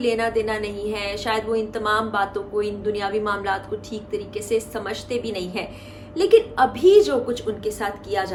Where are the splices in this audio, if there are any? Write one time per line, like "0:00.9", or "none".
none